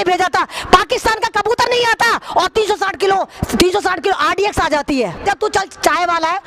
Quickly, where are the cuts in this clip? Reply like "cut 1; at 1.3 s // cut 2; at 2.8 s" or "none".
cut 1; at 5.2 s